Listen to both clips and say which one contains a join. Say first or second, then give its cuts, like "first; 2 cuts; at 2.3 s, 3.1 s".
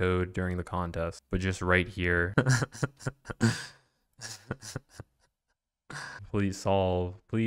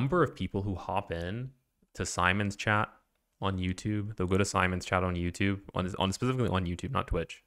first; 3 cuts; at 1.2 s, 2.3 s, 6.2 s